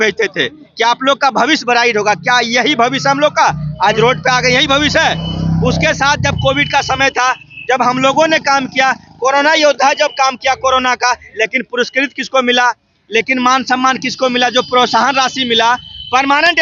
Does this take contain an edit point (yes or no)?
no